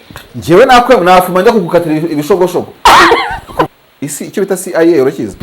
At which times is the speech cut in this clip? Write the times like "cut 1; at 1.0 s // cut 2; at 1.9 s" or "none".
cut 1; at 3.7 s